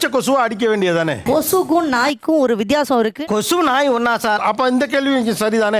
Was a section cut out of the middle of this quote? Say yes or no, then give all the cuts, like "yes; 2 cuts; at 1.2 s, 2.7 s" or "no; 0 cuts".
yes; 1 cut; at 1.2 s